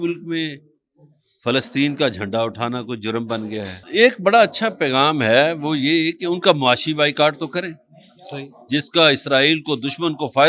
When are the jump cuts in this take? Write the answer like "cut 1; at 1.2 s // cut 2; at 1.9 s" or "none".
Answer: cut 1; at 3.8 s

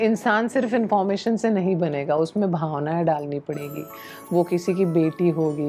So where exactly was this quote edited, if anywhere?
none

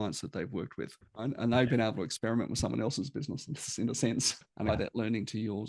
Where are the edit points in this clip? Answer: cut 1; at 4.7 s

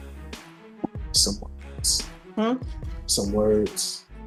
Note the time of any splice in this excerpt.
none

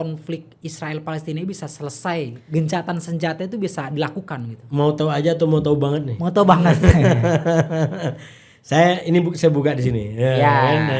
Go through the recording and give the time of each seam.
none

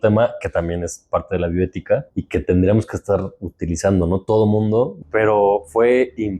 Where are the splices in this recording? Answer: cut 1; at 2.1 s // cut 2; at 5.0 s

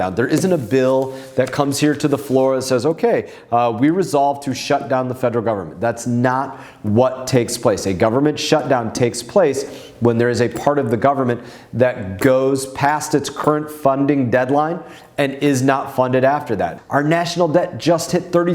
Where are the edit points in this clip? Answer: cut 1; at 16.8 s

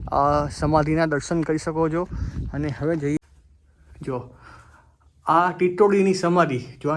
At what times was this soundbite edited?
cut 1; at 3.2 s

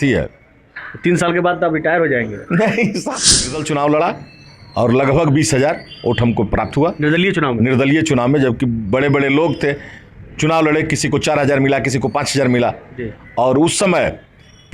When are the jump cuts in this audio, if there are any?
cut 1; at 3.4 s

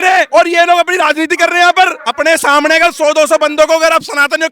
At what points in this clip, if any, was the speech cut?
cut 1; at 2.0 s

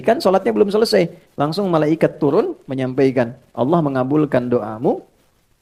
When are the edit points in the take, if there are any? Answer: none

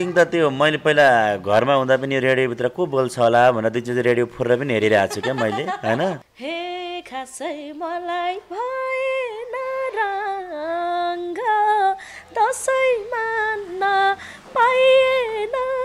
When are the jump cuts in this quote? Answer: cut 1; at 6.3 s

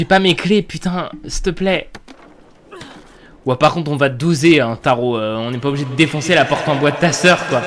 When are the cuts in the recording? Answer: none

